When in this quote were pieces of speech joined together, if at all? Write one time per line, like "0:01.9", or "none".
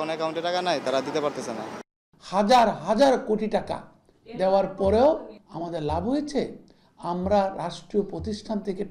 0:01.9